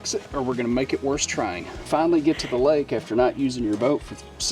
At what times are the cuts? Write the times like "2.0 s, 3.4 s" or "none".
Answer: 1.8 s